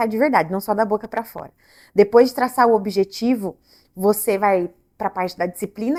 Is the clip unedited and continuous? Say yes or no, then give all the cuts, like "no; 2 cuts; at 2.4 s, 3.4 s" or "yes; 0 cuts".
yes; 0 cuts